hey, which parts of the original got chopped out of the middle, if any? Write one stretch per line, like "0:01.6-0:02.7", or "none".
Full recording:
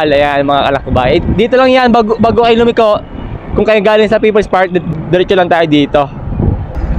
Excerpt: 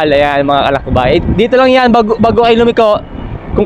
none